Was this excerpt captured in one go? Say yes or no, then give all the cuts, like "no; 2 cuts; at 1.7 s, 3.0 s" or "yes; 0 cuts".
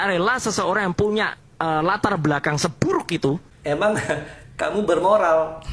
no; 1 cut; at 3.5 s